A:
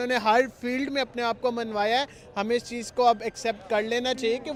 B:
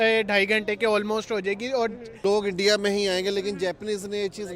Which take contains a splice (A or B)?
B